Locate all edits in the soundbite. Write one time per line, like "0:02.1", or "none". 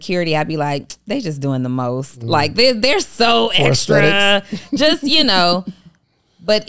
none